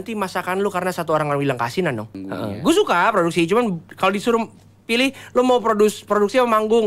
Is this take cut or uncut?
cut